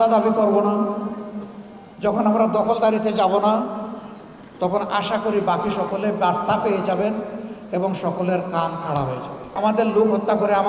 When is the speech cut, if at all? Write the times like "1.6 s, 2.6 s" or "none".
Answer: 9.5 s